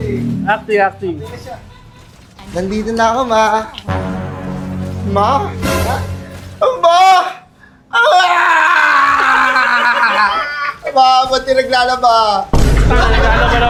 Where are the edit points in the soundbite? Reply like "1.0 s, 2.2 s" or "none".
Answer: none